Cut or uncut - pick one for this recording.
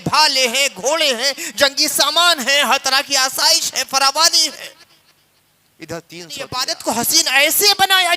cut